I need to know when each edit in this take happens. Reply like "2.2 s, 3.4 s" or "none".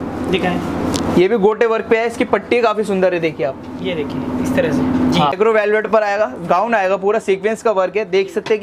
5.3 s